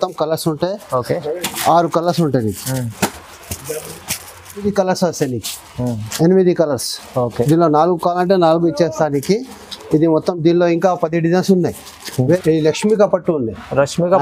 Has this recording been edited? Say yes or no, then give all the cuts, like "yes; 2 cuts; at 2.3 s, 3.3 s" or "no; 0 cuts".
yes; 2 cuts; at 4.7 s, 12.4 s